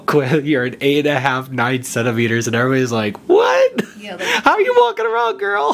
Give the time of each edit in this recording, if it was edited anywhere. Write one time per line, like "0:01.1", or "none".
none